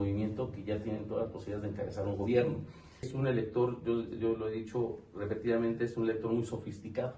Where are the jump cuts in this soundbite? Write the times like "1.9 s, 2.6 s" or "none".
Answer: 3.1 s